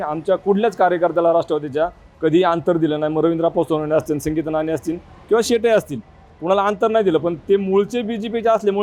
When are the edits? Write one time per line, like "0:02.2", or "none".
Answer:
none